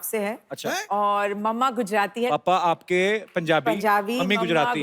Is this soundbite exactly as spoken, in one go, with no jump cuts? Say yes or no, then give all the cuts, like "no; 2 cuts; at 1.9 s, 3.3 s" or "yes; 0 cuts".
no; 1 cut; at 2.3 s